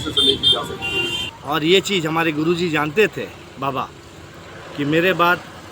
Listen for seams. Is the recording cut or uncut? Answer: cut